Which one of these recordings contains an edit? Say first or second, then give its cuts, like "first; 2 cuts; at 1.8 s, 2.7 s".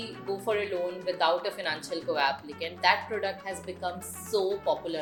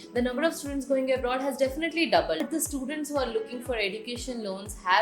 second; 1 cut; at 2.4 s